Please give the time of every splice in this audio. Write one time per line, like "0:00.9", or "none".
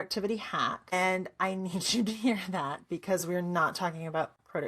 0:00.9